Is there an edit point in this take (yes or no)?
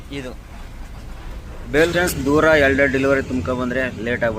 yes